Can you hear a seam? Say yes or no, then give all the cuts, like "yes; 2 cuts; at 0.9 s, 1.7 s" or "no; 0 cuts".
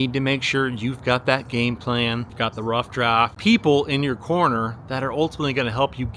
yes; 1 cut; at 2.8 s